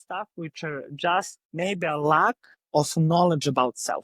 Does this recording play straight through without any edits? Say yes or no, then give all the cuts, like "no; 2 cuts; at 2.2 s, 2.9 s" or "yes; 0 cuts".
no; 2 cuts; at 1.4 s, 2.5 s